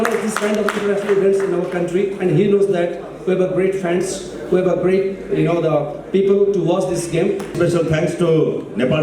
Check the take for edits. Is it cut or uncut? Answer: cut